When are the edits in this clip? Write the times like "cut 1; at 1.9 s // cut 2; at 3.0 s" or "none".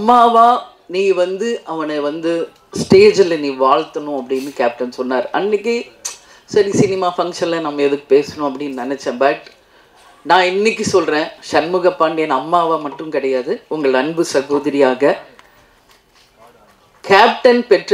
none